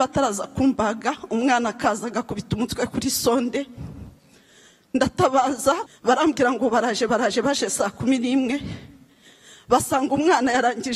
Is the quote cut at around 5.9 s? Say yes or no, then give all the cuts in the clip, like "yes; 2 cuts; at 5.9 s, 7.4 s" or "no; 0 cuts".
yes; 1 cut; at 5.9 s